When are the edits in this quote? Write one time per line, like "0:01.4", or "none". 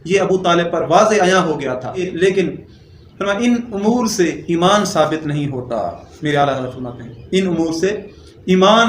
0:02.1
0:06.1